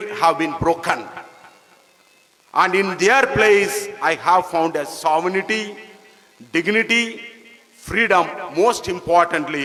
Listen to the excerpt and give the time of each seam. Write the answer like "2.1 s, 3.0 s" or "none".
none